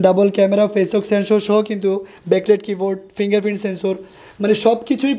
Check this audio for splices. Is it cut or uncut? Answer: uncut